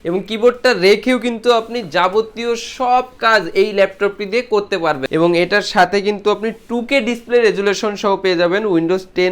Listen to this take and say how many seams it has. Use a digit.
1